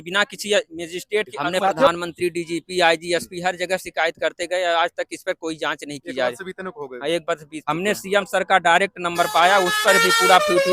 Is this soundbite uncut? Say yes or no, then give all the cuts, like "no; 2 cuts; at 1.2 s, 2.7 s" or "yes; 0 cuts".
no; 2 cuts; at 1.9 s, 7.5 s